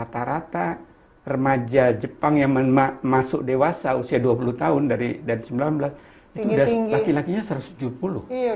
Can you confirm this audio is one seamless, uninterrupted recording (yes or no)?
yes